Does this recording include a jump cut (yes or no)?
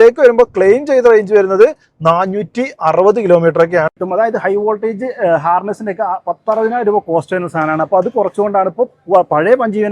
yes